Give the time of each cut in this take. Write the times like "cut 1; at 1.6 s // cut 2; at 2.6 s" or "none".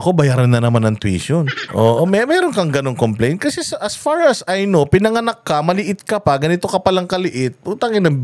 cut 1; at 1.6 s